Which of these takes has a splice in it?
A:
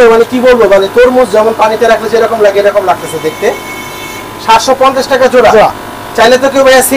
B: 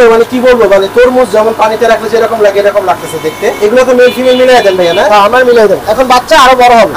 B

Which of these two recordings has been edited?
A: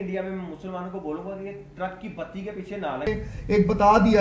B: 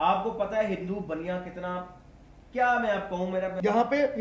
A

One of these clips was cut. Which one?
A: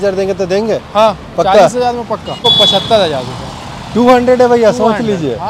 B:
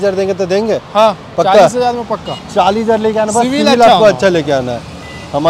A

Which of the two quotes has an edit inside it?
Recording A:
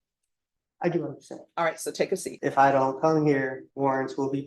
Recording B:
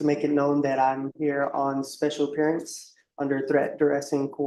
A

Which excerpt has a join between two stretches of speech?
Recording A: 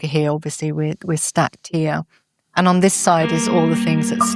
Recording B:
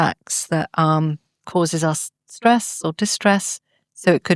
B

